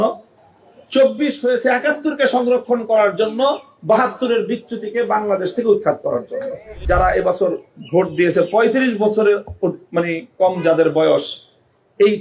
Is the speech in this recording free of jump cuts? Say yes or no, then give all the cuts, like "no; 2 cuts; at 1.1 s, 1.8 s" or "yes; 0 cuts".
no; 1 cut; at 6.7 s